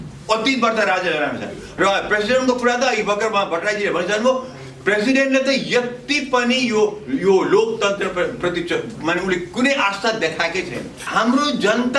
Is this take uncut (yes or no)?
no